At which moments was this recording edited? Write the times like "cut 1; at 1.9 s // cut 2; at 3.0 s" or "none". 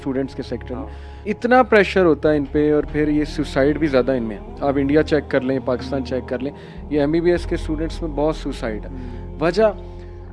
none